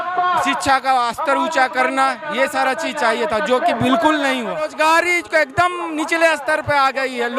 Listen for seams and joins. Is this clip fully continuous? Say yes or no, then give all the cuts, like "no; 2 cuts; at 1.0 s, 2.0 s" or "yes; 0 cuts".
no; 1 cut; at 4.7 s